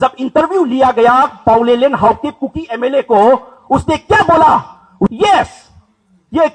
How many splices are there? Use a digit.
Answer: 1